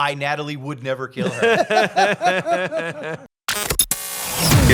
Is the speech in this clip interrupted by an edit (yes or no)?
yes